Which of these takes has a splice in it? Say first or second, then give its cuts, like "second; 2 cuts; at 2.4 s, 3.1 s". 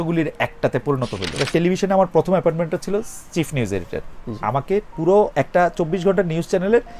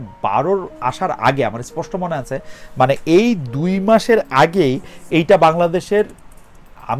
first; 1 cut; at 1.5 s